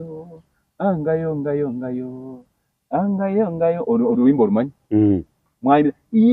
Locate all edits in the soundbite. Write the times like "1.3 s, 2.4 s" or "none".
none